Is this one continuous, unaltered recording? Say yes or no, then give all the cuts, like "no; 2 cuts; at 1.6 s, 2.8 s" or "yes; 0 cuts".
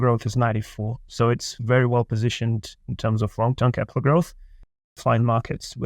no; 1 cut; at 4.9 s